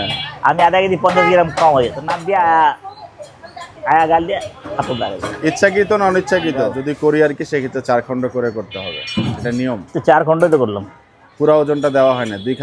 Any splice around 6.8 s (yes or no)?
yes